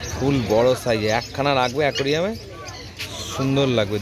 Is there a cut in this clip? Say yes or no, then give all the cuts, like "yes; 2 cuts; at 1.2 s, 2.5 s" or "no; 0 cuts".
no; 0 cuts